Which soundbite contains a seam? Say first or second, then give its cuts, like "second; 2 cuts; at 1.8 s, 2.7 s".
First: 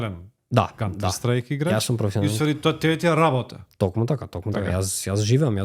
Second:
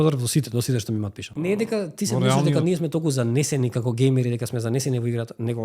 second; 1 cut; at 1.3 s